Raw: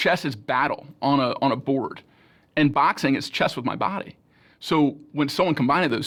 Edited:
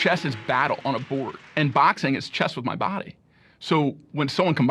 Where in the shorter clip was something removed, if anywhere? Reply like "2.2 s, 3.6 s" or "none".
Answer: 0.9 s